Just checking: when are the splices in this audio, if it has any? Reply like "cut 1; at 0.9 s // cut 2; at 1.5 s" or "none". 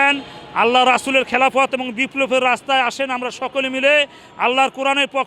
none